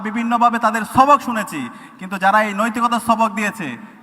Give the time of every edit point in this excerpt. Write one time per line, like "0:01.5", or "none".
none